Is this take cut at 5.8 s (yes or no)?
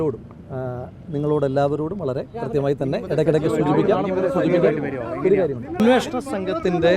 yes